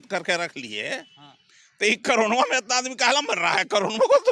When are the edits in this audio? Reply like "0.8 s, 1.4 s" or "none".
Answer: none